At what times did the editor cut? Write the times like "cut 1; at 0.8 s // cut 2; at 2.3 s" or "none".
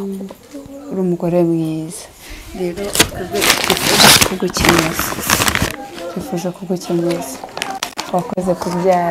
none

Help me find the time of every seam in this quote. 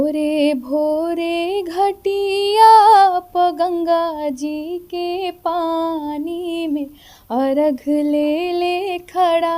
none

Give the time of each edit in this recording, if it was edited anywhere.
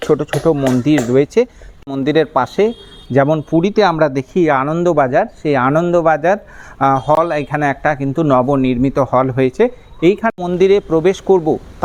cut 1; at 1.6 s // cut 2; at 10.3 s

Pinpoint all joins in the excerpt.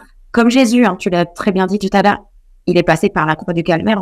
none

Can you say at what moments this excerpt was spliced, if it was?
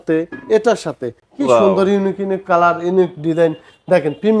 cut 1; at 1.2 s

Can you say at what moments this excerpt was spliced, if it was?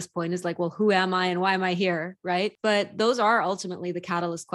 cut 1; at 2.6 s

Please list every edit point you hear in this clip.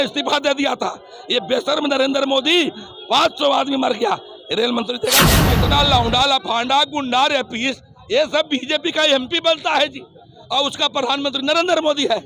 cut 1; at 5.3 s

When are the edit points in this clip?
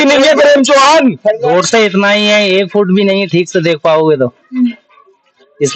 cut 1; at 1.4 s

